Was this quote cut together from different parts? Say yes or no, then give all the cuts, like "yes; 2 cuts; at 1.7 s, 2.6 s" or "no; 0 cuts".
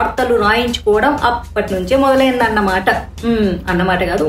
no; 0 cuts